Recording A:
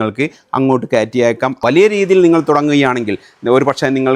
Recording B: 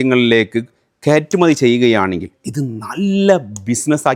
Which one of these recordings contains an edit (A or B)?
A